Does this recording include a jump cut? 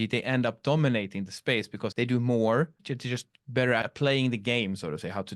yes; 3 cuts; at 1.8 s, 2.9 s, 3.9 s

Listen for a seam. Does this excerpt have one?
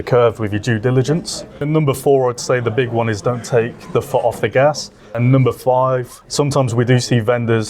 yes; 3 cuts; at 1.6 s, 5.2 s, 6.1 s

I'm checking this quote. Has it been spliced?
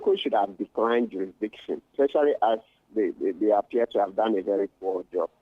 yes; 1 cut; at 1.9 s

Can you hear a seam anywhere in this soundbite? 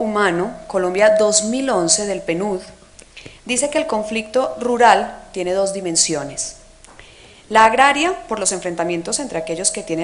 no; 0 cuts

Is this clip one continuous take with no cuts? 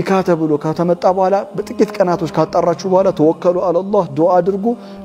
yes; 0 cuts

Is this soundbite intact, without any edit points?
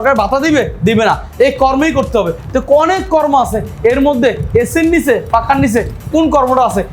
yes; 0 cuts

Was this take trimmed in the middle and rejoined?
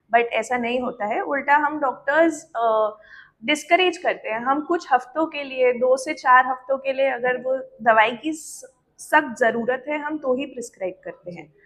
no; 0 cuts

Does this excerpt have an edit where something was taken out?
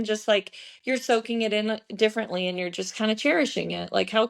no; 0 cuts

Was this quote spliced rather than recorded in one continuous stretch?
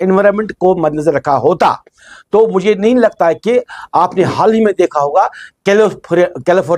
no; 0 cuts

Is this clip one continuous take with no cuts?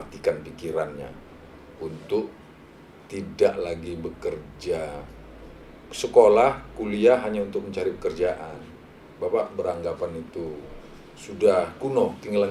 yes; 0 cuts

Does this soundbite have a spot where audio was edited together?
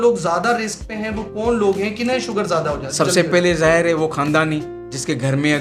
no; 0 cuts

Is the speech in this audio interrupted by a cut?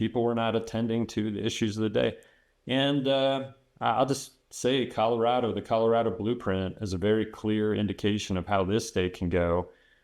no; 0 cuts

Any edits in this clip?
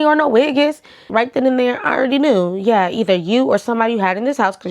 yes; 1 cut; at 1.1 s

